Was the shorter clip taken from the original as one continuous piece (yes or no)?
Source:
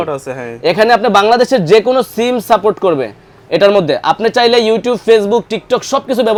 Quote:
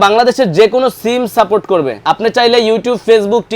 no